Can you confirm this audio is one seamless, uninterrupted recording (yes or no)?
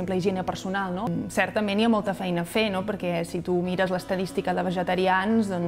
no